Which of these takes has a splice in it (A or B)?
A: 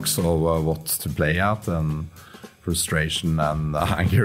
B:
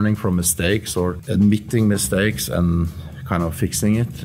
B